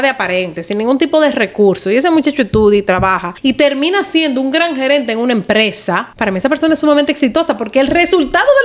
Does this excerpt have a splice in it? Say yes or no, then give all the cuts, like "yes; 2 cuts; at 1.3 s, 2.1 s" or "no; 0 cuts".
yes; 2 cuts; at 3.3 s, 6.1 s